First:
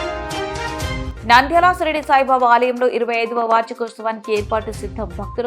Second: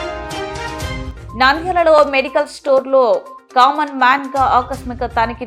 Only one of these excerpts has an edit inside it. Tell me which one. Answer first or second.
first